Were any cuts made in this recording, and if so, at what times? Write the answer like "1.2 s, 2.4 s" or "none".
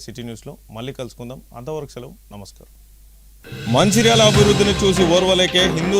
3.2 s

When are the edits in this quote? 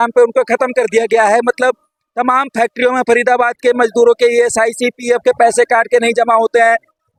none

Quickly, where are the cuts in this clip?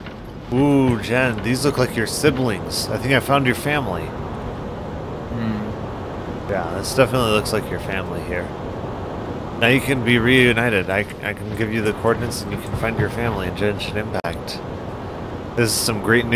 none

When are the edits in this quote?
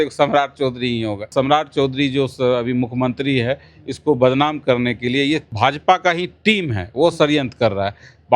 1.3 s, 5.5 s

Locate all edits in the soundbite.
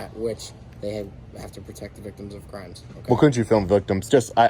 none

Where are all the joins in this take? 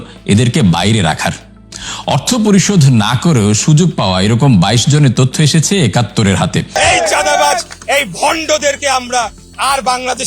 6.7 s

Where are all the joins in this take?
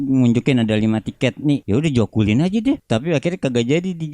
1.6 s, 2.8 s

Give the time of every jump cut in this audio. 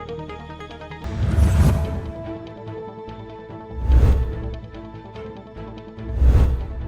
1.0 s

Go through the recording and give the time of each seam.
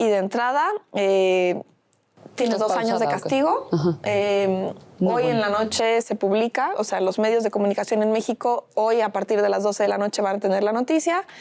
none

